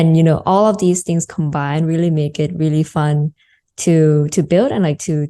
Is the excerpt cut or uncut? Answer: uncut